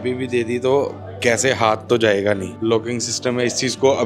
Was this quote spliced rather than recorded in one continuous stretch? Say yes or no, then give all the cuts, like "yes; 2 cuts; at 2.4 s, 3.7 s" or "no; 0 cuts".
yes; 1 cut; at 2.6 s